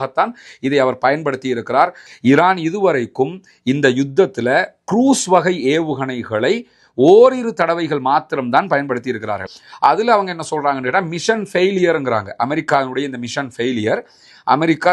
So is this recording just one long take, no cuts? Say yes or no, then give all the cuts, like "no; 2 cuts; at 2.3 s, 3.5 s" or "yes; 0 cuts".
no; 2 cuts; at 2.0 s, 9.5 s